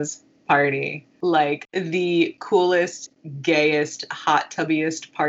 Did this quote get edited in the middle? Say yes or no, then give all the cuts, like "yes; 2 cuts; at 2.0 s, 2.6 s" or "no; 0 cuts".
yes; 2 cuts; at 1.0 s, 1.6 s